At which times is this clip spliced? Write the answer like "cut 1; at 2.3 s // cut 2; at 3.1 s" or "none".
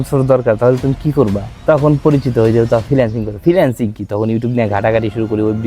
cut 1; at 1.5 s